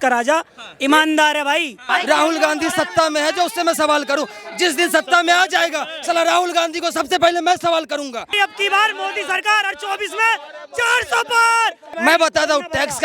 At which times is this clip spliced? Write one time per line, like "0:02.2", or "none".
0:01.8
0:08.4
0:11.9